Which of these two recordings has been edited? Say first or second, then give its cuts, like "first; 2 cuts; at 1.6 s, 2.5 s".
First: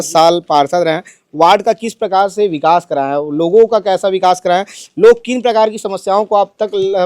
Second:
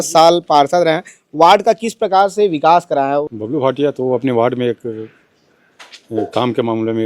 second; 1 cut; at 3.3 s